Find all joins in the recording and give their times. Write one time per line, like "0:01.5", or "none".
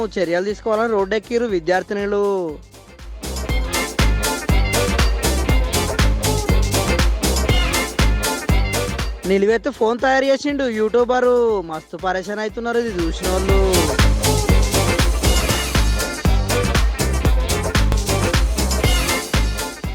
0:17.9